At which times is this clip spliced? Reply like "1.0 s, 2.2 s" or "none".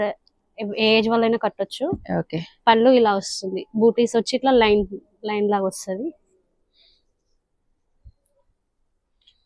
none